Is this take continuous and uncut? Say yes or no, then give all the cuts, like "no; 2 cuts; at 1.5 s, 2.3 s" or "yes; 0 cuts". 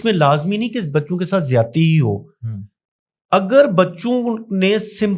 yes; 0 cuts